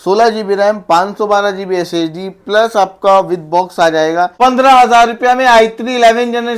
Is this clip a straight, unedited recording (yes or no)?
no